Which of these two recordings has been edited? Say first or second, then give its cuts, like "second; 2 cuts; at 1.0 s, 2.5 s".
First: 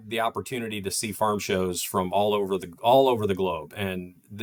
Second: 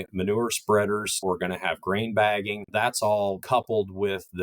second; 3 cuts; at 1.2 s, 2.7 s, 3.4 s